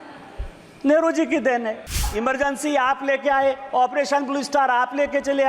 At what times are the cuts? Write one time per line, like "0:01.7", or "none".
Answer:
0:02.1